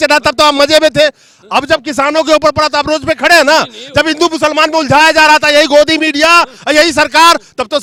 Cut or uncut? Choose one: uncut